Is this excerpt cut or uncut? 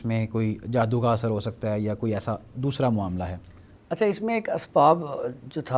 uncut